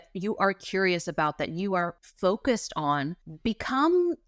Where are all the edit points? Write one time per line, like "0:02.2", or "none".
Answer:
0:02.0
0:03.2